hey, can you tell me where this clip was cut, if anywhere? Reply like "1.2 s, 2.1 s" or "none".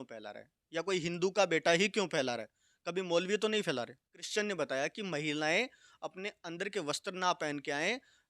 4.2 s